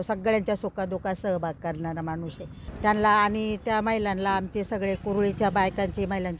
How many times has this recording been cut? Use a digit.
2